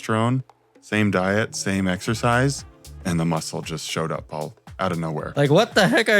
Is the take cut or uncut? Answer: cut